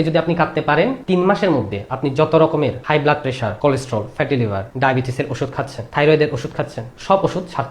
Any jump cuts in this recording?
yes; 3 cuts; at 1.0 s, 3.0 s, 4.7 s

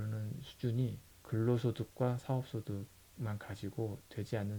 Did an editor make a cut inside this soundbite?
yes; 1 cut; at 1.1 s

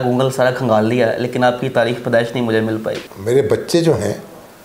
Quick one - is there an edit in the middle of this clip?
yes; 1 cut; at 3.0 s

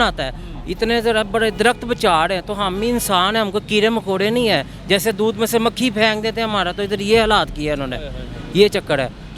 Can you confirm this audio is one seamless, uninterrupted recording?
yes; 0 cuts

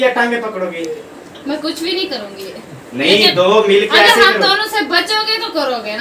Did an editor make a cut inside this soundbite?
no; 0 cuts

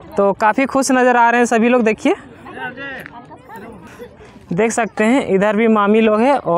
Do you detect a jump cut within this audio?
no; 0 cuts

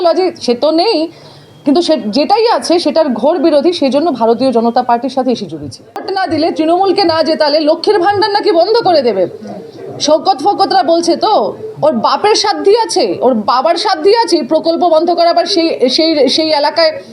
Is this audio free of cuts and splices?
no; 1 cut; at 6.1 s

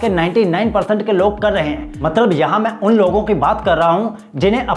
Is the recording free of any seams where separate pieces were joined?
yes; 0 cuts

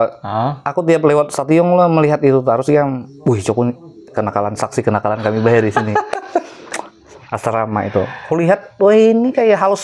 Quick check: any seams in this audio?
no; 0 cuts

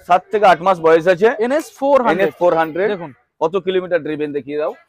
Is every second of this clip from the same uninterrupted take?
yes; 0 cuts

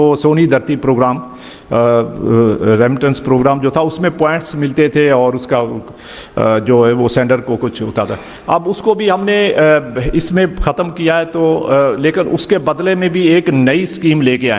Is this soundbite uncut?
yes; 0 cuts

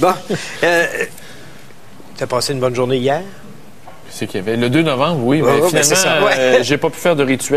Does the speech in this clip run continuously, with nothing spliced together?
yes; 0 cuts

